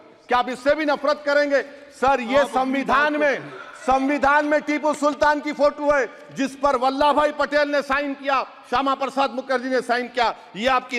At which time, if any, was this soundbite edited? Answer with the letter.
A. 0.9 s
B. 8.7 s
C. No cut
C